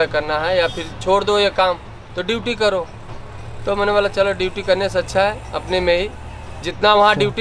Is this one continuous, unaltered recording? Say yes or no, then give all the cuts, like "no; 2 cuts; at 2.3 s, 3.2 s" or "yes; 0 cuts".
yes; 0 cuts